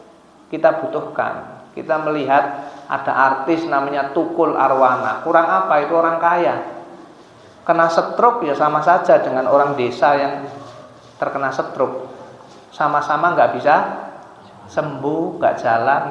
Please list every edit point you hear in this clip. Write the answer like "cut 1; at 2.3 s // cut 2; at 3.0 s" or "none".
none